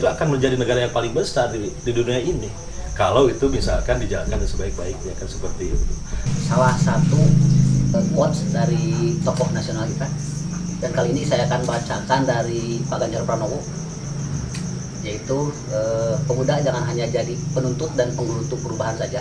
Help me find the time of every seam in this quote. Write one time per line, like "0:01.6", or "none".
0:06.3
0:07.9

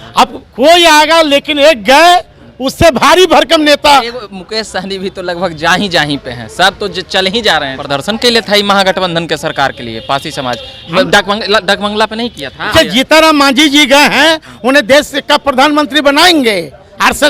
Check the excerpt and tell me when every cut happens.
0:07.8
0:12.7

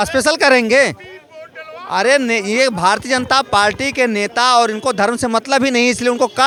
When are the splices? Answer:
none

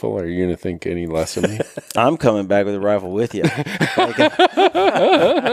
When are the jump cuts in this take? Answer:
none

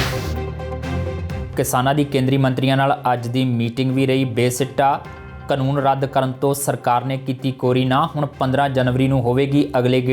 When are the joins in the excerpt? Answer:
0:01.3

